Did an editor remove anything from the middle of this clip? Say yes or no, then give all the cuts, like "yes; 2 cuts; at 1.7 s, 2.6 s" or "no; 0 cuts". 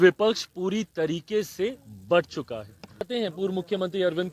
yes; 1 cut; at 3.1 s